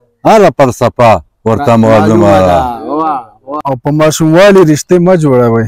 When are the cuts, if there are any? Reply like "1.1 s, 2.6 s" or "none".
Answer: 3.5 s